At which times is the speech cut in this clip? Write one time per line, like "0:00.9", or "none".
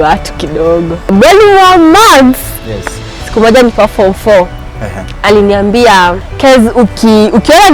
0:01.1
0:03.3